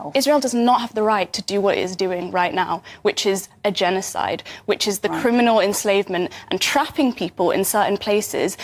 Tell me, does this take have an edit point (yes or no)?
no